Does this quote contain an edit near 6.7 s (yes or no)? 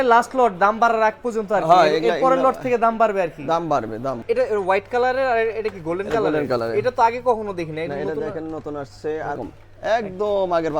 no